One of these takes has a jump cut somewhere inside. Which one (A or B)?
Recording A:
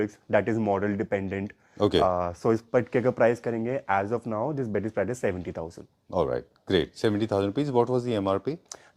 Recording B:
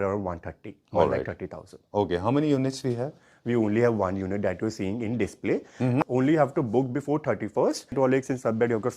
B